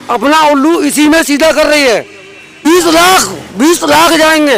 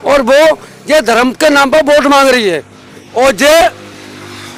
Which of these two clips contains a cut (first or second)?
first